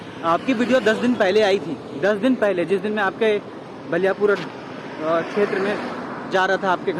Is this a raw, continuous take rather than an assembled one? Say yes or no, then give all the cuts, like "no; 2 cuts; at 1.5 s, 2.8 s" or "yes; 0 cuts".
yes; 0 cuts